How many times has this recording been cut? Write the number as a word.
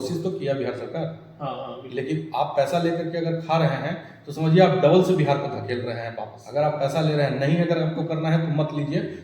one